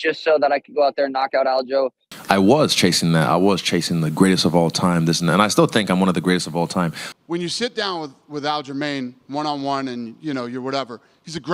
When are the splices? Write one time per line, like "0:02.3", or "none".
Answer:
0:02.1
0:07.1